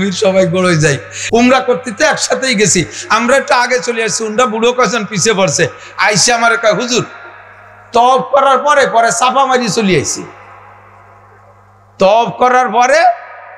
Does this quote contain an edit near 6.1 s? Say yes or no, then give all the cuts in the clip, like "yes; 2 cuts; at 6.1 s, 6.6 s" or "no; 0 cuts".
no; 1 cut; at 1.1 s